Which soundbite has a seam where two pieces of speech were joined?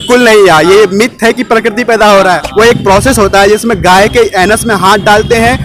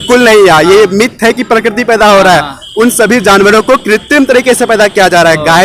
first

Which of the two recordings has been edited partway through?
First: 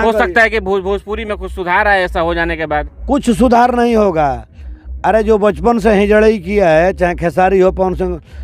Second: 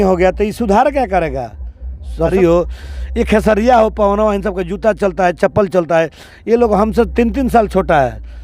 second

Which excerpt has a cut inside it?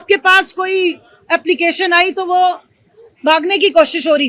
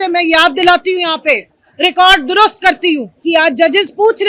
second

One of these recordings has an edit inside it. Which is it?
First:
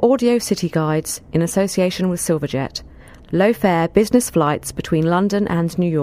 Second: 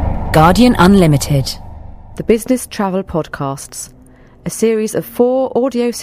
second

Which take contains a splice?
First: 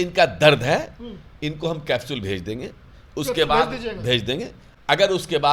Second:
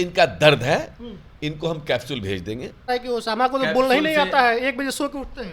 second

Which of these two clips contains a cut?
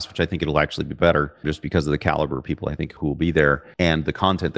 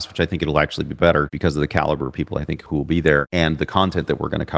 second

